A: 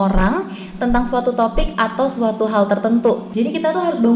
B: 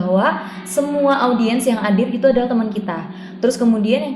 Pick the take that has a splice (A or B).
A